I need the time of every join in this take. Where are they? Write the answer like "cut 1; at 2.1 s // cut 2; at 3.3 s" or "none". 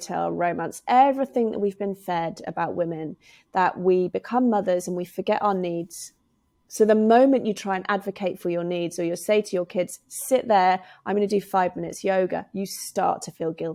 none